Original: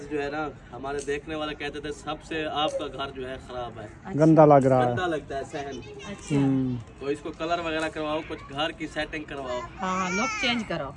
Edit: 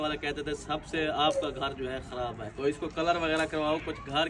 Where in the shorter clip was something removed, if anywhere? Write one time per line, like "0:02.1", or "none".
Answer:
0:02.5